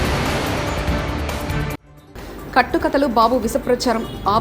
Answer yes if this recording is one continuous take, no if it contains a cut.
no